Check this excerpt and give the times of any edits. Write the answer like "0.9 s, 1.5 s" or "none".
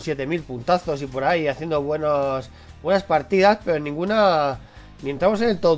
2.8 s